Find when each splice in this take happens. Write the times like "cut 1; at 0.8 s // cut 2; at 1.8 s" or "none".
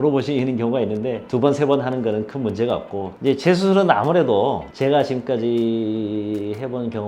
cut 1; at 1.2 s // cut 2; at 3.2 s